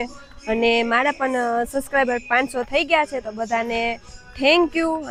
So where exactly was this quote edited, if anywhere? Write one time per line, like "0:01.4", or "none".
none